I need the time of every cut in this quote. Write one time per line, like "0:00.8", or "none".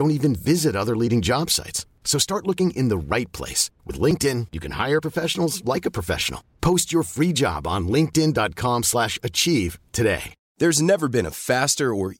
0:10.4